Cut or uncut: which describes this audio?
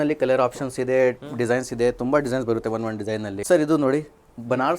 cut